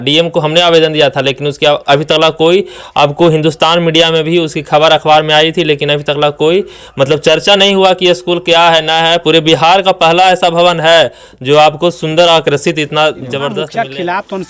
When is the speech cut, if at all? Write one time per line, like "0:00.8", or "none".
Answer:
0:13.6